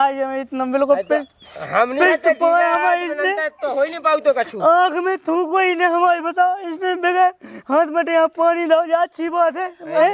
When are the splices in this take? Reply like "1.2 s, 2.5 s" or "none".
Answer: none